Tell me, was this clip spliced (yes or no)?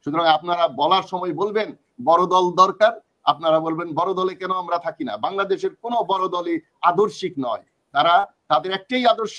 no